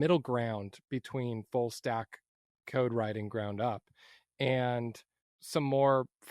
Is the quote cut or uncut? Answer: cut